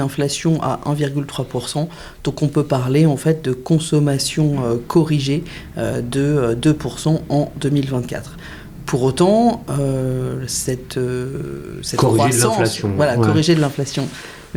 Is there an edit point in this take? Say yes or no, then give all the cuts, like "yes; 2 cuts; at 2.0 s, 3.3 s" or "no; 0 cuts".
no; 0 cuts